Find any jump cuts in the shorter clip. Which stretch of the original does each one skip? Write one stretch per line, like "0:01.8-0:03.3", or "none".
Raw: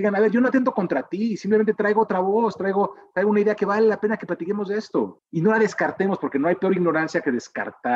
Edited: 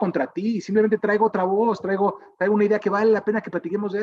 none